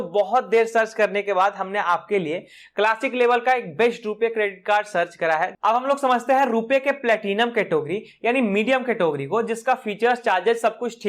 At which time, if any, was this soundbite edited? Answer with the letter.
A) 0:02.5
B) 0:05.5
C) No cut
B